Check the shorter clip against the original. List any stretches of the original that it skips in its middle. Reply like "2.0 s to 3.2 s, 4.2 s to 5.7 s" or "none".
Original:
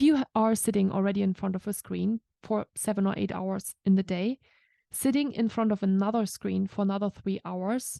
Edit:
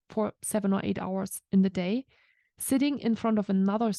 none